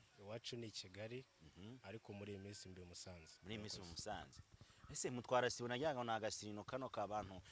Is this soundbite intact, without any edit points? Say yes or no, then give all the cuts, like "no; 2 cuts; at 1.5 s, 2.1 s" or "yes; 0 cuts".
yes; 0 cuts